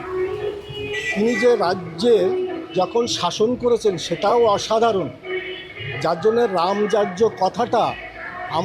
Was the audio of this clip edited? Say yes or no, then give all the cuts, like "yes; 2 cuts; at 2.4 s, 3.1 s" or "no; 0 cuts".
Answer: no; 0 cuts